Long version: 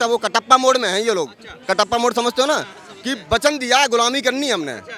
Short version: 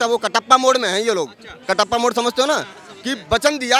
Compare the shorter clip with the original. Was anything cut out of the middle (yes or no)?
no